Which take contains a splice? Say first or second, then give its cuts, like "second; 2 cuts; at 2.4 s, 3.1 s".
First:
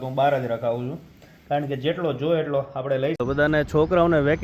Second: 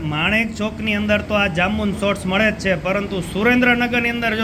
first; 1 cut; at 3.3 s